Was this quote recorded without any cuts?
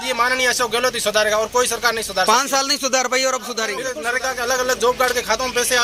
no; 1 cut; at 3.9 s

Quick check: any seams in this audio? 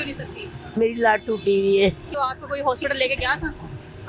yes; 1 cut; at 2.1 s

